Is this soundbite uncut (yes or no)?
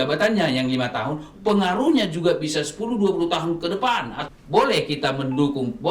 no